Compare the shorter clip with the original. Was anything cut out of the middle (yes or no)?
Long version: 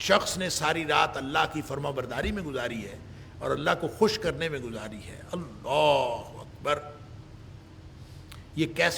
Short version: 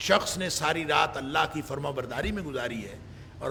no